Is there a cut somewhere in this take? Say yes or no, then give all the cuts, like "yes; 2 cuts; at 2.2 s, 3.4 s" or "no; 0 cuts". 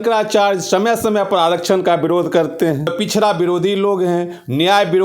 yes; 1 cut; at 2.9 s